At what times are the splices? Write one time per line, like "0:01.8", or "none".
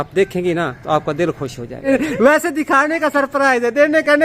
0:01.8